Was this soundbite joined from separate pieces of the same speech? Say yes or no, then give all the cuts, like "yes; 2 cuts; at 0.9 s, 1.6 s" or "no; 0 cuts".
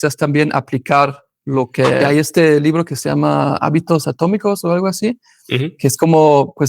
yes; 1 cut; at 2.0 s